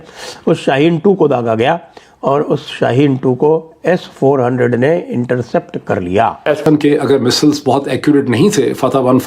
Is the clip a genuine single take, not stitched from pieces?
no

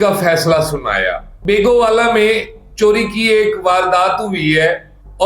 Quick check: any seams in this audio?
yes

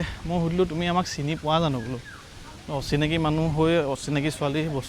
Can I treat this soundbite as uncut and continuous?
yes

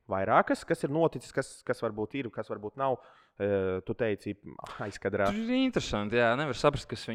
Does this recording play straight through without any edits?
yes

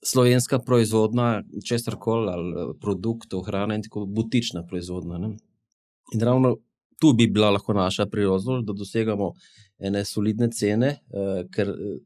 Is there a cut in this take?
no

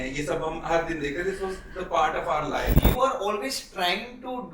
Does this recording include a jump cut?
yes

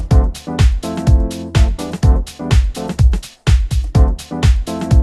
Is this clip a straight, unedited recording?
yes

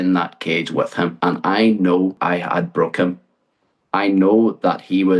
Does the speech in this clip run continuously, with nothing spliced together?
no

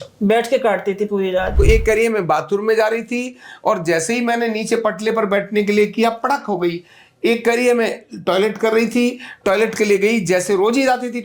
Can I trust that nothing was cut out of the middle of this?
no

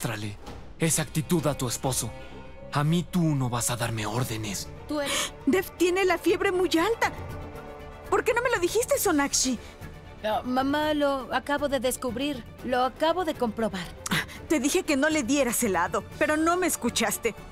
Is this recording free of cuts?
no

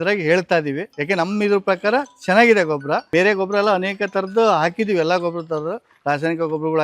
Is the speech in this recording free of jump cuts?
no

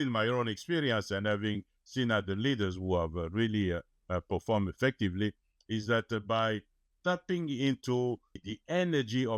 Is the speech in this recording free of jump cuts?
no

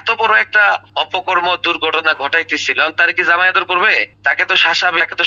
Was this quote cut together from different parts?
no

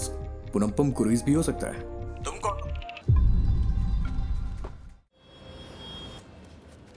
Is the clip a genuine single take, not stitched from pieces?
no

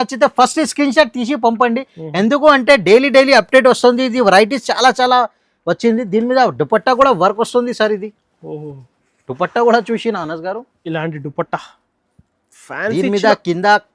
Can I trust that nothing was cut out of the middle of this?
yes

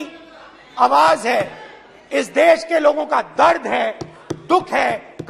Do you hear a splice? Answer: no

